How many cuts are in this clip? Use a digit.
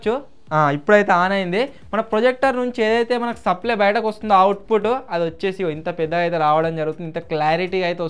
0